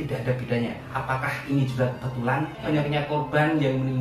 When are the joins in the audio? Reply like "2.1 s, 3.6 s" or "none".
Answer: 0.9 s, 2.6 s